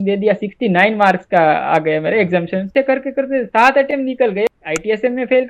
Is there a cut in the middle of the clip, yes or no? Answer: yes